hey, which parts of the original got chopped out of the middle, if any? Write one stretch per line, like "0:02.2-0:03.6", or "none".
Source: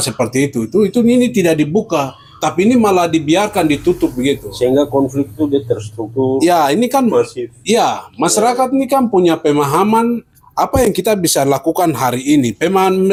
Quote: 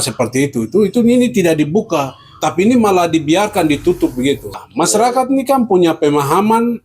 0:04.5-0:08.0

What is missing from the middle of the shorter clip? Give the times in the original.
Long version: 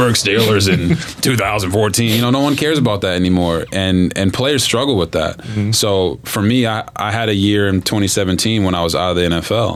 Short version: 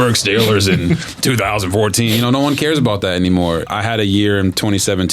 0:03.7-0:07.0

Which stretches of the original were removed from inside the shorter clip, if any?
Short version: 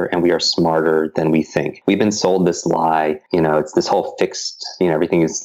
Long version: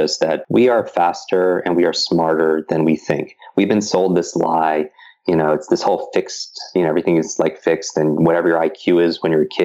0:03.3-0:03.4
0:04.9-0:05.2

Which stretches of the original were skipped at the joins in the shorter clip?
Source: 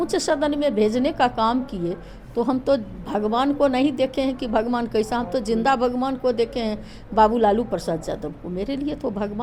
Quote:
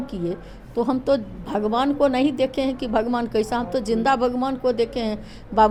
none

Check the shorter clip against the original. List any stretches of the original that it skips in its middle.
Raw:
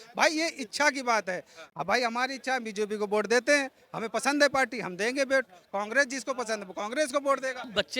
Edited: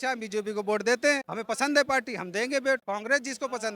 0:03.8-0:04.0
0:05.5-0:05.7

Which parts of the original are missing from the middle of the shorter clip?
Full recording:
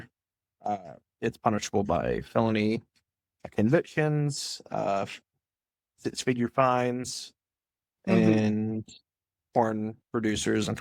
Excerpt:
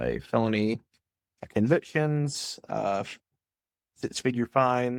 none

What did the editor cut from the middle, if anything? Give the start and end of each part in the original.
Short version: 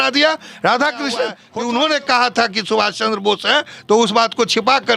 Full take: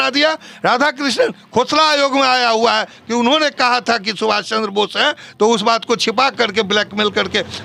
0:01.4-0:02.9

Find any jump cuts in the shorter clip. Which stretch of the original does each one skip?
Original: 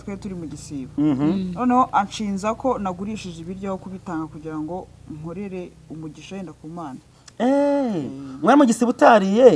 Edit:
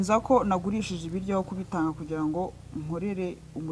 none

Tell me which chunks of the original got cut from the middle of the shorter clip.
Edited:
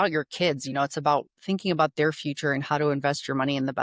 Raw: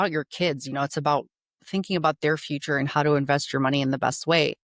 0:01.3-0:01.6

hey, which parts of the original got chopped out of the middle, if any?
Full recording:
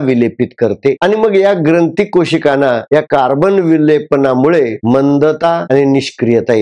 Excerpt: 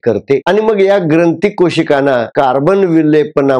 0:02.9-0:03.1

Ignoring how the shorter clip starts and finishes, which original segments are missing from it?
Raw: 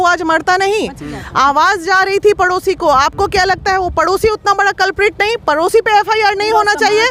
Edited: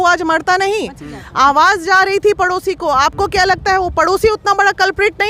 none

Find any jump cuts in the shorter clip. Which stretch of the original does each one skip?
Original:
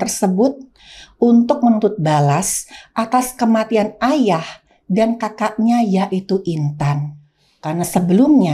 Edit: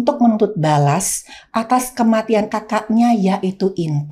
0:03.9-0:05.2

